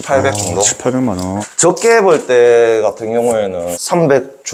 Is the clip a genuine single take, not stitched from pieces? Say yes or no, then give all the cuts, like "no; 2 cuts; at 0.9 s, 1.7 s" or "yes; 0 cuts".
yes; 0 cuts